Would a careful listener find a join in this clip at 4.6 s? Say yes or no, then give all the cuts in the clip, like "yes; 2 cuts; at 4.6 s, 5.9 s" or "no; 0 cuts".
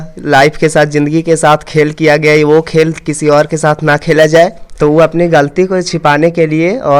yes; 1 cut; at 4.6 s